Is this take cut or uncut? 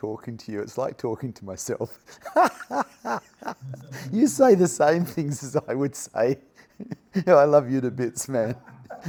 uncut